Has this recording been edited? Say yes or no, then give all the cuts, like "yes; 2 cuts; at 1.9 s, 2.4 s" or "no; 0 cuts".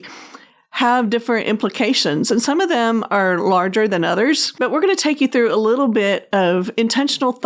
yes; 1 cut; at 4.5 s